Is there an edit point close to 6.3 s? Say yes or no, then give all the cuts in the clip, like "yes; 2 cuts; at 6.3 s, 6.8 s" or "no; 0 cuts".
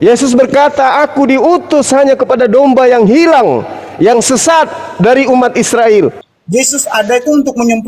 yes; 1 cut; at 6.3 s